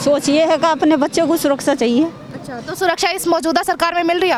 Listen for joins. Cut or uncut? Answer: uncut